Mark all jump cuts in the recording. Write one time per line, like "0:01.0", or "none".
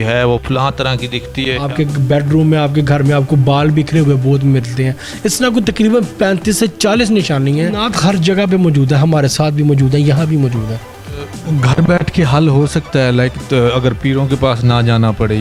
0:01.6
0:07.8
0:11.3